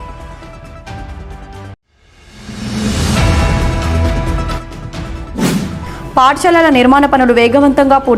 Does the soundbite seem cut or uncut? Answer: uncut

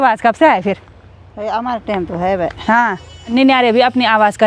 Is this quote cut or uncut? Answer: cut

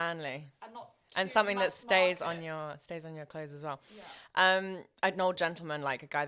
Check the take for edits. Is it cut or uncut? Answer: uncut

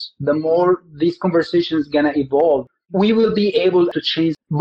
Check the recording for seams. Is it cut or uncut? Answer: cut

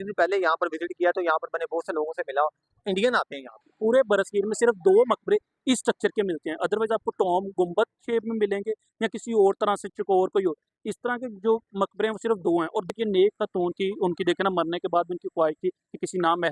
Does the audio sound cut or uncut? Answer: cut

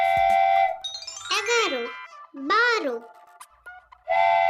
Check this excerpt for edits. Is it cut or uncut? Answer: uncut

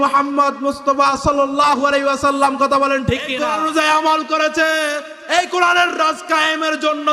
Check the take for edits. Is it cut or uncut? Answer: cut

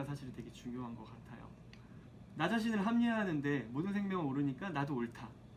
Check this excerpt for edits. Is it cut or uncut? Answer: uncut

